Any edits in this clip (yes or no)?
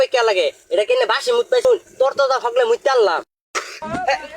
yes